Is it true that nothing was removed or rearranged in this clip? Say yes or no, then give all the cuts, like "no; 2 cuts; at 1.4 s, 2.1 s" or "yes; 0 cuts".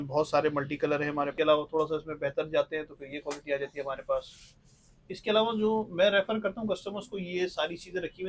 no; 1 cut; at 1.3 s